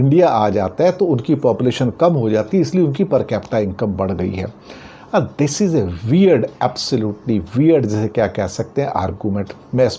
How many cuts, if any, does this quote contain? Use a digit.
0